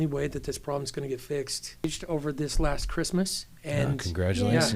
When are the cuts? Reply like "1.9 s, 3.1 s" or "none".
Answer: 1.8 s